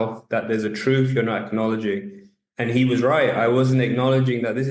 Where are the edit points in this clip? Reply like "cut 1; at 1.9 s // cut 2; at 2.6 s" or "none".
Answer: none